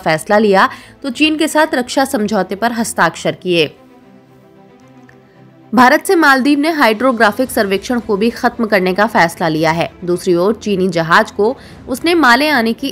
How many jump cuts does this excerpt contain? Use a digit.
2